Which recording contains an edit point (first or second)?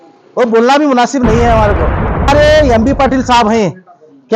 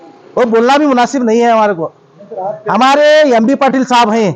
first